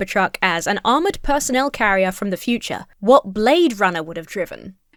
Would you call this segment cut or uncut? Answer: uncut